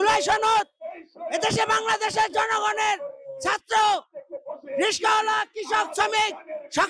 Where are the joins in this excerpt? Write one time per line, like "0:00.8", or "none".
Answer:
none